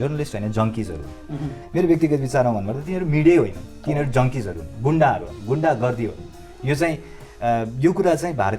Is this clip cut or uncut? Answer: cut